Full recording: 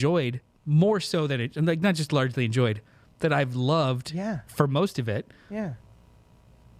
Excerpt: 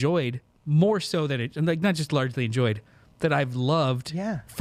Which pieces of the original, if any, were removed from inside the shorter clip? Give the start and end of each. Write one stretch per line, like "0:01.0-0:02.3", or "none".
none